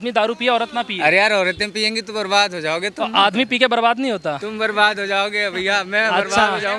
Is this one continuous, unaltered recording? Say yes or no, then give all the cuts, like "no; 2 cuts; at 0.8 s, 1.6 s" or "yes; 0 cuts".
yes; 0 cuts